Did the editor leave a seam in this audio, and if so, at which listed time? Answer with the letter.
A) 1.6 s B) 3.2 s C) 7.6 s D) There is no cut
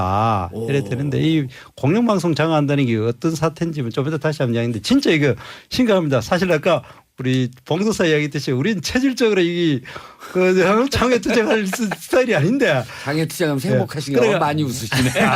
C